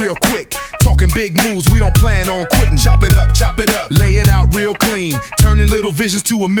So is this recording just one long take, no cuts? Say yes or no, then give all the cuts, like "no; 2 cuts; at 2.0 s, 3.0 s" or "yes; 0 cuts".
yes; 0 cuts